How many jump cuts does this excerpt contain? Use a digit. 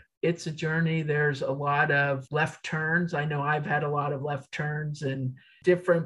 1